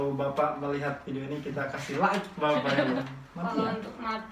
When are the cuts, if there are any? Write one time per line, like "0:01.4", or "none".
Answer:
0:03.0